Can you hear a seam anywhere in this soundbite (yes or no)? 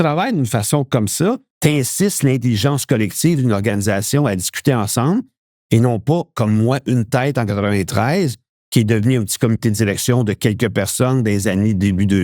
yes